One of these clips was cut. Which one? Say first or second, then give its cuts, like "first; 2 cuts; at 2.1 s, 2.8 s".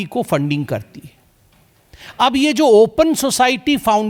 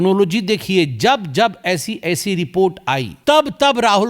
second; 1 cut; at 3.1 s